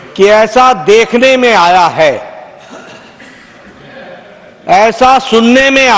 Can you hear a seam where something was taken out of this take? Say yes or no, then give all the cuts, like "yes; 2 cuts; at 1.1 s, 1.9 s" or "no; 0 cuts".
no; 0 cuts